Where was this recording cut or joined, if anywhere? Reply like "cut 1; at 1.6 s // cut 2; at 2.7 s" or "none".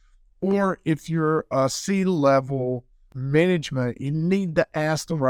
cut 1; at 3.2 s